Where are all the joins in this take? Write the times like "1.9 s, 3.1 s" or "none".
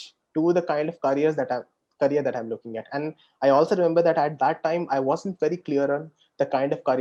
none